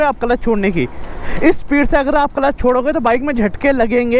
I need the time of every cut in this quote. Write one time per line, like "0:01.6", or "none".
none